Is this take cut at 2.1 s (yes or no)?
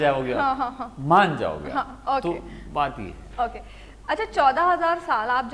no